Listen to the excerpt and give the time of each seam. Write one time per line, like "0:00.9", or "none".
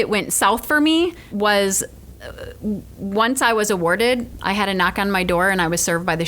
0:01.3
0:04.3